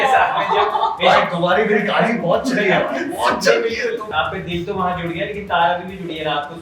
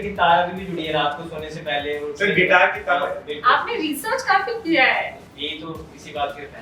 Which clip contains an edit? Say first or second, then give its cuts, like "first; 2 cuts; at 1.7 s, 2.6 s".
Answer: first; 1 cut; at 4.1 s